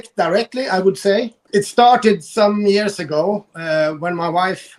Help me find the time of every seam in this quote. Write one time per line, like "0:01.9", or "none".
0:01.4